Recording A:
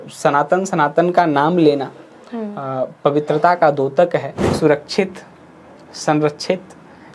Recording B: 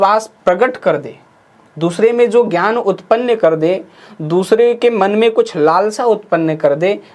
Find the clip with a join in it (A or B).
A